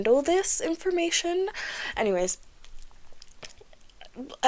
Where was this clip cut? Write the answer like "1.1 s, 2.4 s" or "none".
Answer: none